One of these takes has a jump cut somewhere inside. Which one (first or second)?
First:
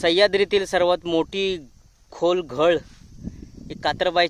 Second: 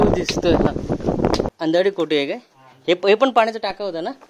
second